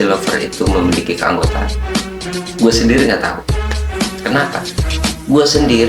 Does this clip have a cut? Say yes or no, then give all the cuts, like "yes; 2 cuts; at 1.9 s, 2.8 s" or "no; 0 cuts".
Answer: no; 0 cuts